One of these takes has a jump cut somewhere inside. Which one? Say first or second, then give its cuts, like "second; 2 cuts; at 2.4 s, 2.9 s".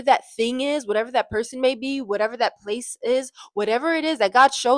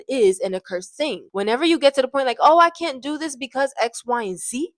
second; 1 cut; at 1.3 s